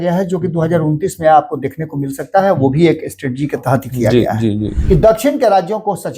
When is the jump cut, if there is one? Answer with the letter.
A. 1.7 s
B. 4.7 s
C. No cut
B